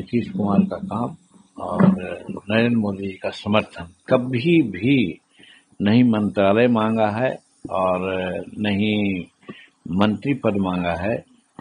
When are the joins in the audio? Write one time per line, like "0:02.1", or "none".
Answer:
0:04.0